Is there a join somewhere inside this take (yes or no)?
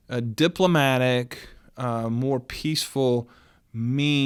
no